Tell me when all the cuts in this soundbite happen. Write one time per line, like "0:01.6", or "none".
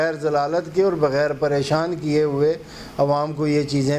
none